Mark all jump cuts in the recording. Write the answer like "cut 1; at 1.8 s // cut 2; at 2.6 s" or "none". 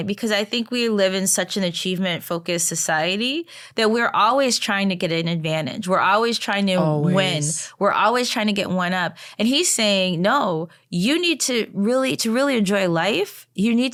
none